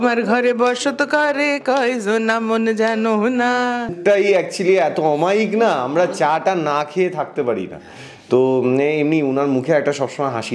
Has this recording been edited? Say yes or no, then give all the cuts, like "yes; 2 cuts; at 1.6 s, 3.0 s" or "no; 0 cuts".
yes; 1 cut; at 4.0 s